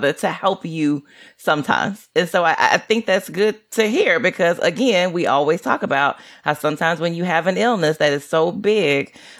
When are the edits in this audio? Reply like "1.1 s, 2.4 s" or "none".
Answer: none